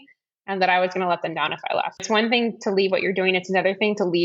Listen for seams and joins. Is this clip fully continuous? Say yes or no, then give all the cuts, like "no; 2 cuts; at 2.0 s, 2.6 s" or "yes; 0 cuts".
no; 1 cut; at 2.0 s